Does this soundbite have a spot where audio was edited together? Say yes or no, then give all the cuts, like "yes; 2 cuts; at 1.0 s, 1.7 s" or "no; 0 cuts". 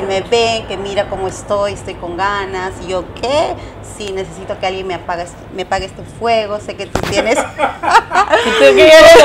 no; 0 cuts